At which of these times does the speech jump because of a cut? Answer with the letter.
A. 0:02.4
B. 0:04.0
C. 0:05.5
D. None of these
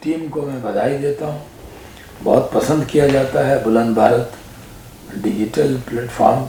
D